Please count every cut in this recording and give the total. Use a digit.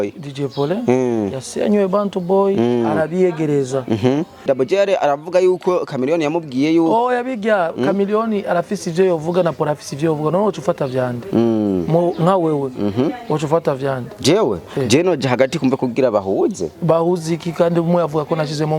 1